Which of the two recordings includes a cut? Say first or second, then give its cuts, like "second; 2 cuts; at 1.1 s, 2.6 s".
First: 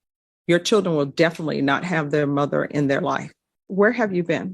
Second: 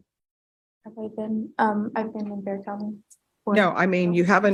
first; 1 cut; at 3.6 s